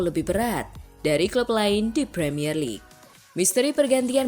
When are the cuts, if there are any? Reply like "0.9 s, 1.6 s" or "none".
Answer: 2.9 s